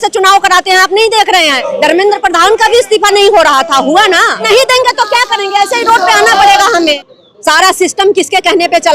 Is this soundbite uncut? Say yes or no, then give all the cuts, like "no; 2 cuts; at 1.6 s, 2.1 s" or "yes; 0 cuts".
no; 3 cuts; at 1.6 s, 4.4 s, 7.0 s